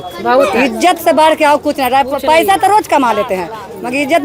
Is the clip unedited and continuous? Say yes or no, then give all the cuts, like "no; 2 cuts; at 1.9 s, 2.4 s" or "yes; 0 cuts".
yes; 0 cuts